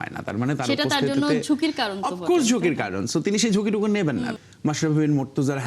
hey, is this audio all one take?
no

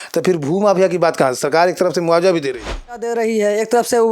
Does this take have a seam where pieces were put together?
yes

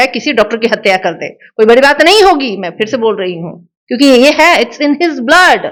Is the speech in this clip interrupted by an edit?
no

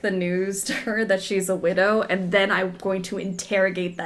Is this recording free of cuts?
yes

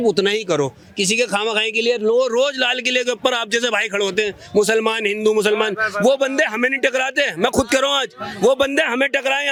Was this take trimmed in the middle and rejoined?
no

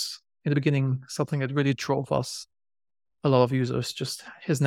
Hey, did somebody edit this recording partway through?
no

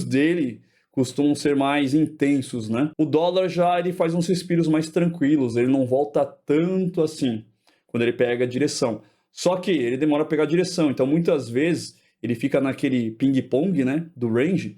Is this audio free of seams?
no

